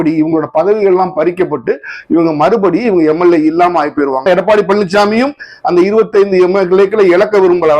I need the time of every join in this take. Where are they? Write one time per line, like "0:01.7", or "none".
0:04.2